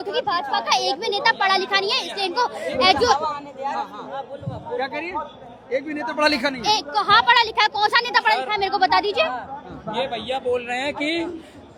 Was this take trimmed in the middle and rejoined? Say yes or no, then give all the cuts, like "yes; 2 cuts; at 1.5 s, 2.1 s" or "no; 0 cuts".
no; 0 cuts